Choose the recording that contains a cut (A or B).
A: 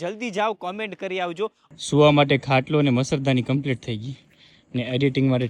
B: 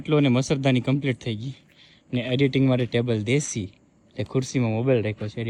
A